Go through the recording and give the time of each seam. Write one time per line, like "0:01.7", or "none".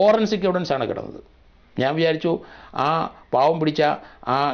none